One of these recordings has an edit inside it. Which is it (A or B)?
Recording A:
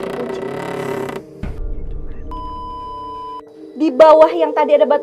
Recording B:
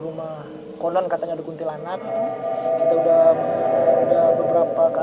A